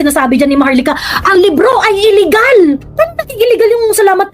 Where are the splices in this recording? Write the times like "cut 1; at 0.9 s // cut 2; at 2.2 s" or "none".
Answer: cut 1; at 2.9 s